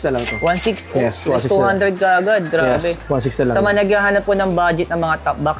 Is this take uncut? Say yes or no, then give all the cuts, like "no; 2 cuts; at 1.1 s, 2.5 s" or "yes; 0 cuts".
yes; 0 cuts